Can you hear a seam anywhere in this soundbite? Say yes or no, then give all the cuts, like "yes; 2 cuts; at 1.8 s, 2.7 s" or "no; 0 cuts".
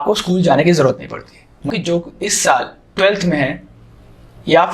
yes; 1 cut; at 1.7 s